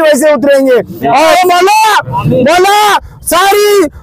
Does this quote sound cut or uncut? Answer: cut